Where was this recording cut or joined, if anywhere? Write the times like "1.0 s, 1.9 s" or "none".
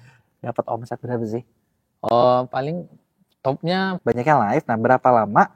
4.0 s